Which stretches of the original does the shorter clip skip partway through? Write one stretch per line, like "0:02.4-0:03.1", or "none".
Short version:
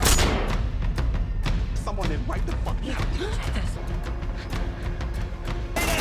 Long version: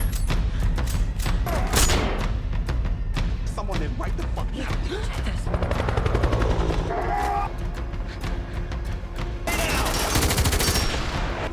0:05.5-0:07.5